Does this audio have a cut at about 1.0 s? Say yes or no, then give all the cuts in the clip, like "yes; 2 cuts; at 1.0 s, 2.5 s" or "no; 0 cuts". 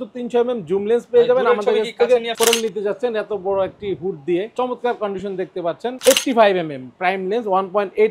no; 3 cuts; at 2.3 s, 4.5 s, 6.0 s